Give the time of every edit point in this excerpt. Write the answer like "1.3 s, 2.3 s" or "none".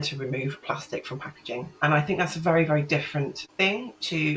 3.4 s